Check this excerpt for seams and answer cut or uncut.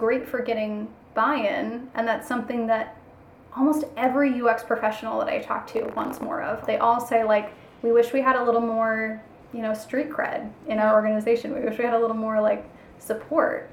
cut